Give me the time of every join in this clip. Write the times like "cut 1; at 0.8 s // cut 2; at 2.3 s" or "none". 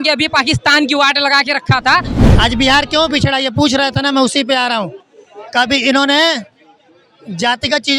cut 1; at 2.2 s

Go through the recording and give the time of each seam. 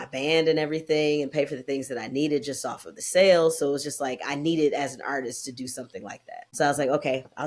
cut 1; at 6.5 s

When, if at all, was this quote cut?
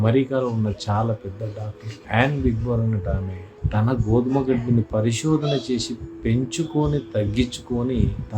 cut 1; at 3.6 s

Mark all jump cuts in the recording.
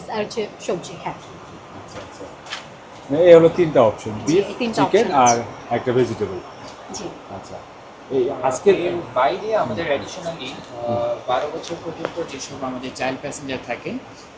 none

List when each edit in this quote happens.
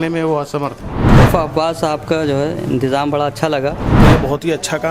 cut 1; at 1.2 s // cut 2; at 3.9 s

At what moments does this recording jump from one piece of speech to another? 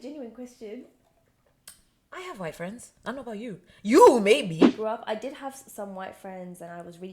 cut 1; at 4.7 s

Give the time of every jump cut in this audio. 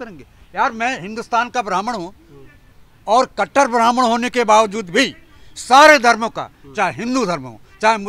none

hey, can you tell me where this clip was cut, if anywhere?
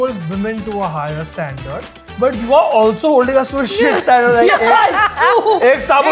none

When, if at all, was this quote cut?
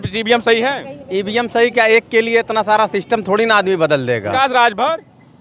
cut 1; at 4.3 s

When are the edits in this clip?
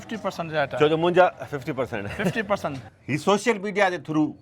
cut 1; at 2.9 s

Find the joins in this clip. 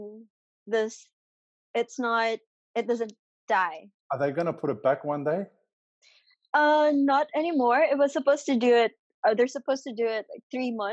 cut 1; at 3.9 s

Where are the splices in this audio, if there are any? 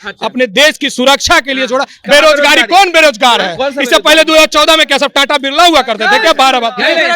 cut 1; at 2.0 s

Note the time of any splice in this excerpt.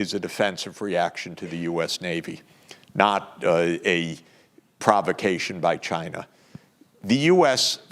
none

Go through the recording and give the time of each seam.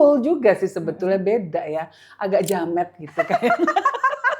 none

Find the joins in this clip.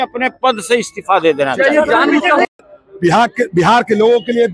cut 1; at 2.7 s

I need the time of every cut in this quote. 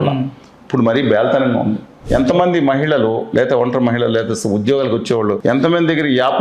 cut 1; at 1.9 s // cut 2; at 5.4 s

